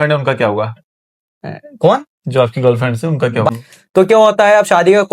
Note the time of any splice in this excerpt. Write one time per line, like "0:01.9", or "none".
0:03.5